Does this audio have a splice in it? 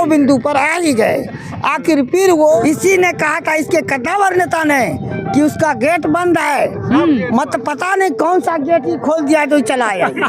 yes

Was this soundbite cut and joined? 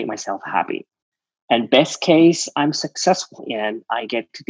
yes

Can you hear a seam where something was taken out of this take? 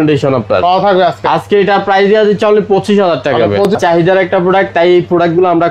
yes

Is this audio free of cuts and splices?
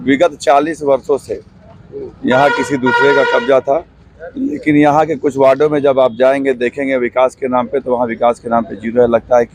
yes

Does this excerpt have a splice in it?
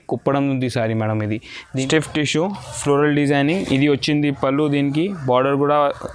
yes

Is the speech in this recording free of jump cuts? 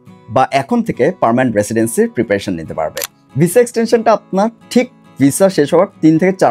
no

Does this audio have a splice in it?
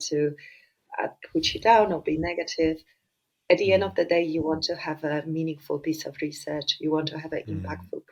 no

